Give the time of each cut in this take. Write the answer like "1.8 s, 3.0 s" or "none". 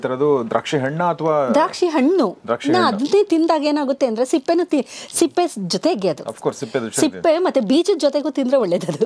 none

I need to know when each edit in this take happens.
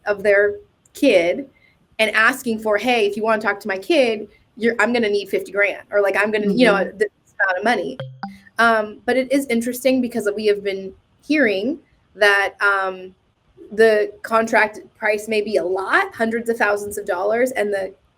8.1 s

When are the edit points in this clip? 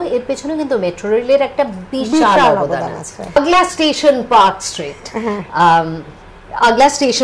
3.4 s

